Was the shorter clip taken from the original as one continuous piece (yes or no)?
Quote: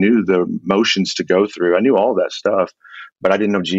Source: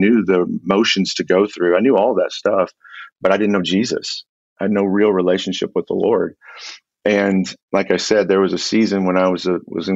yes